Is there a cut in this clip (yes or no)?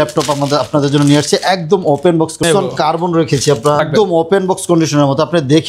yes